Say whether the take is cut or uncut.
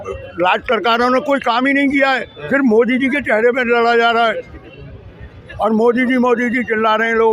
uncut